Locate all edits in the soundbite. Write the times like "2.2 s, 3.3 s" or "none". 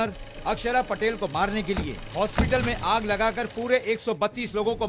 none